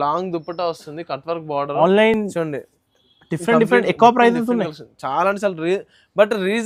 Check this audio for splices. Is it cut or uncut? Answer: uncut